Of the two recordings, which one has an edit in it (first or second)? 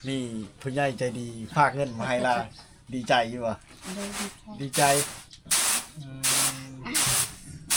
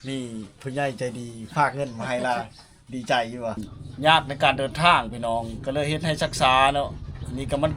second